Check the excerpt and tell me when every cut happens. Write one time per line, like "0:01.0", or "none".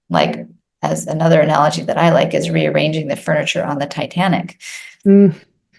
none